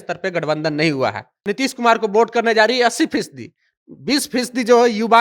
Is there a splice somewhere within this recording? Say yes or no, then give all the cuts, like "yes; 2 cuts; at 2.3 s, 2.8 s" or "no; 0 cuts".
yes; 1 cut; at 1.4 s